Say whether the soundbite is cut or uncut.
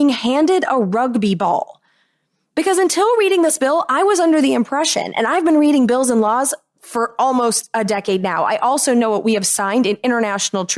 uncut